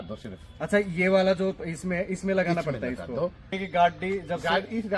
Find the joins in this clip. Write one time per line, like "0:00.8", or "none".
0:03.5